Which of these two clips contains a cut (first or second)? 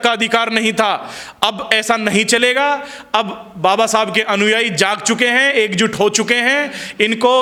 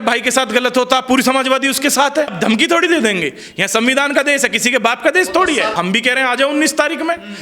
second